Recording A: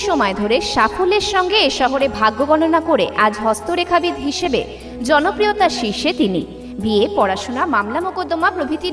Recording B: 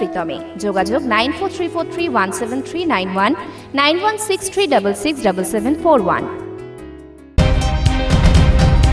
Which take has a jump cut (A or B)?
B